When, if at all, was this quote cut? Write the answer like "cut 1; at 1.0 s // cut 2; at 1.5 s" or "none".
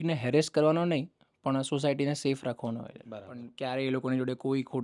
cut 1; at 3.5 s